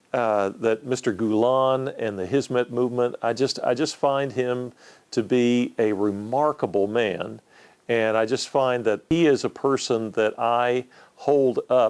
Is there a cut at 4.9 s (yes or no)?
no